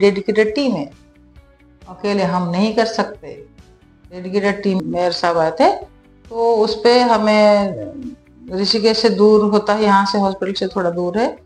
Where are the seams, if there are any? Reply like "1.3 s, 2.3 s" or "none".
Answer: 4.8 s